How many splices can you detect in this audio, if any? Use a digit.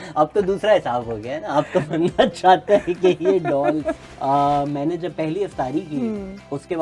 1